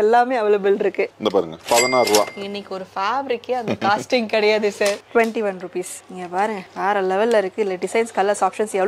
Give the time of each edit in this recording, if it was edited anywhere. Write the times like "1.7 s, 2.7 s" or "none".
1.1 s, 5.0 s